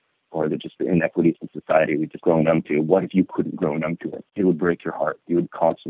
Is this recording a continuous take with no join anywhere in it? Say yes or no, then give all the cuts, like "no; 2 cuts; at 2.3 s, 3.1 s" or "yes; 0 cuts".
no; 2 cuts; at 2.1 s, 4.2 s